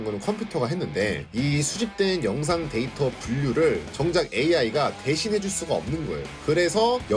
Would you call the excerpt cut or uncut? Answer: uncut